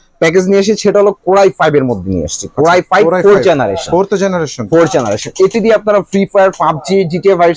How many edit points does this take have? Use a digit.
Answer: 0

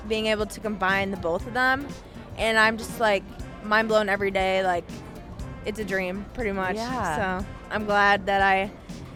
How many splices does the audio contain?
0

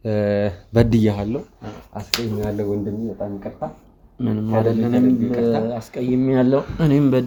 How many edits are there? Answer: 0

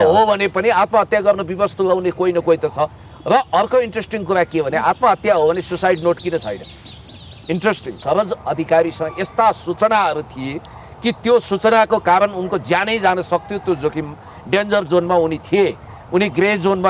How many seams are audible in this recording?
1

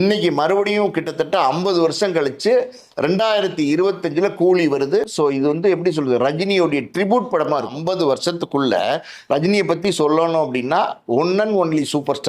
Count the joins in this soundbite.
1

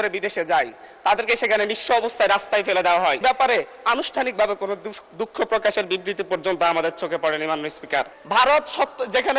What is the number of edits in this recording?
2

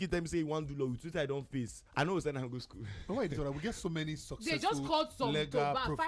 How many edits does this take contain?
0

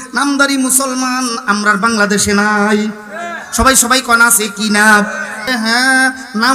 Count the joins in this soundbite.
1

